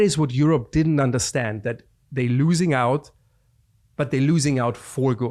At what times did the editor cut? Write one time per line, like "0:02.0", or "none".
none